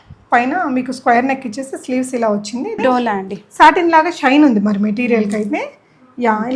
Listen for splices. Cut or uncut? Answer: cut